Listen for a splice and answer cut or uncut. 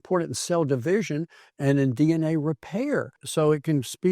cut